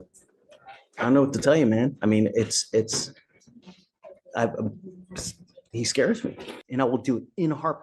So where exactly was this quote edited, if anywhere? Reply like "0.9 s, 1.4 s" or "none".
6.6 s

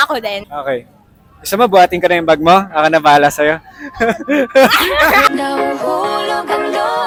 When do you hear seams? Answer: none

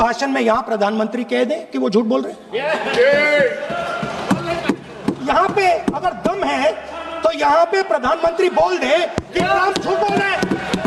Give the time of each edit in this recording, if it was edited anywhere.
none

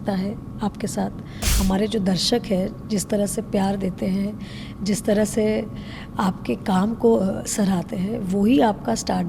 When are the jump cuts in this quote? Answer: 1.5 s

